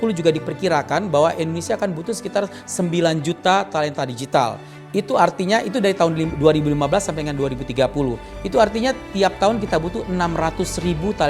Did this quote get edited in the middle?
no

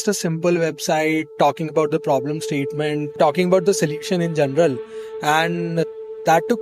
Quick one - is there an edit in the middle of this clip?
yes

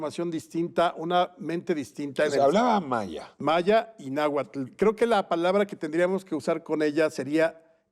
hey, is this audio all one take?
no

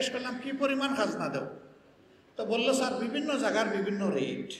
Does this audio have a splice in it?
no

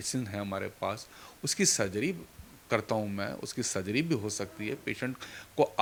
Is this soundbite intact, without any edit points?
yes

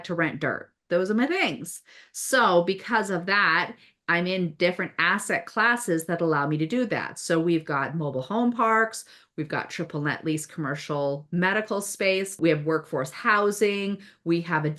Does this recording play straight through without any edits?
no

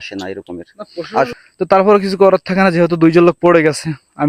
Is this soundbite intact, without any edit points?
no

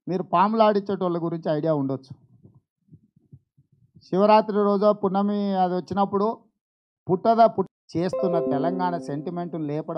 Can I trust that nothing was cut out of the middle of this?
no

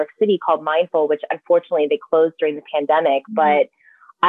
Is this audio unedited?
yes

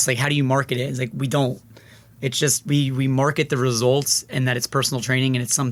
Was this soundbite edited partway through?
no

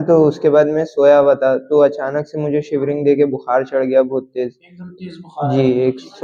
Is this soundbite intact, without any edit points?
yes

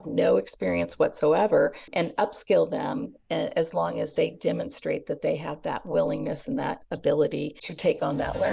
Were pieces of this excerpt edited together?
yes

